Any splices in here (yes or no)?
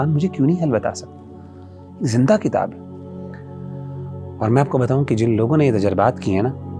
no